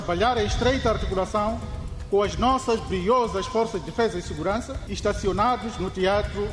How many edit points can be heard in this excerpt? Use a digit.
1